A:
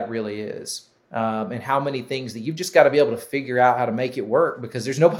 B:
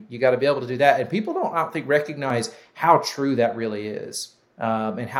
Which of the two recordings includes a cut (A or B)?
B